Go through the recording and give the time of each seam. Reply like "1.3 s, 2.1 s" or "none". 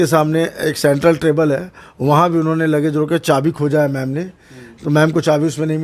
none

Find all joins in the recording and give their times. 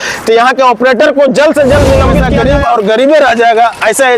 2.3 s

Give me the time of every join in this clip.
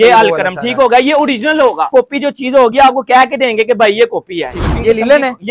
1.9 s, 4.6 s

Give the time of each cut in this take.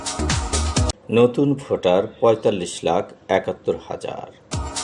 0.9 s

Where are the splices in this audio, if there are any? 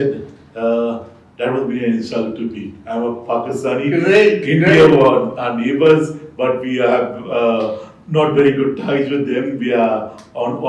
none

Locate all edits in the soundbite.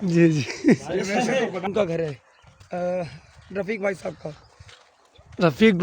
1.7 s

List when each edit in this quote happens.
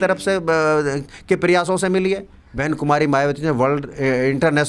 2.4 s

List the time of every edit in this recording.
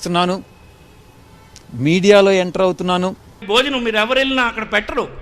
3.4 s

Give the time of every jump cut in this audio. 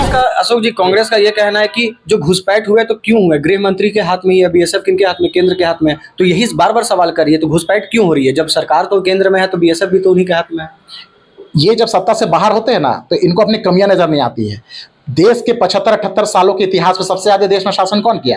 none

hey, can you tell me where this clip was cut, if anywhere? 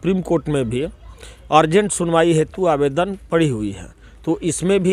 none

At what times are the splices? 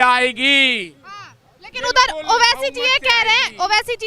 none

